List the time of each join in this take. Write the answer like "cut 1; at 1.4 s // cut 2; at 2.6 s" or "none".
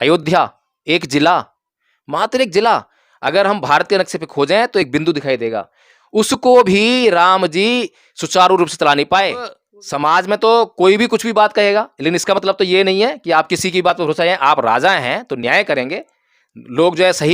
cut 1; at 9.5 s